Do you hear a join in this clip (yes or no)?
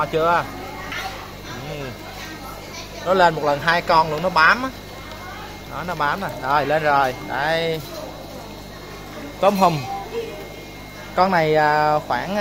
yes